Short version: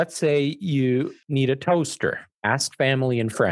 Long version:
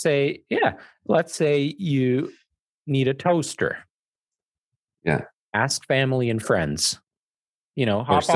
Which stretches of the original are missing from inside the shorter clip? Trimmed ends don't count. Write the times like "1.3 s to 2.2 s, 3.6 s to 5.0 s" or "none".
2.4 s to 2.8 s, 3.9 s to 5.4 s